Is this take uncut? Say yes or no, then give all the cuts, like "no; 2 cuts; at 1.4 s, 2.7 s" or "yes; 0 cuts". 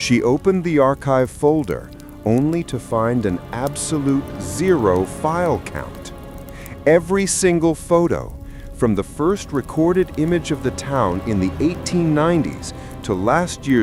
yes; 0 cuts